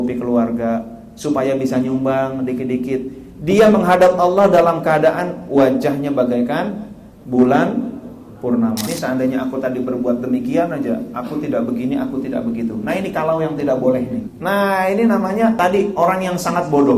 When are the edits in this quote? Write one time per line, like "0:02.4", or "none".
0:08.9
0:14.3
0:15.6